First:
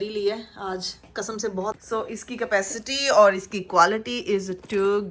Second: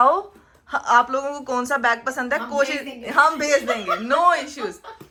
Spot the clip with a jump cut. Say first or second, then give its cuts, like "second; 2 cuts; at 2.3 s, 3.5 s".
first; 1 cut; at 1.8 s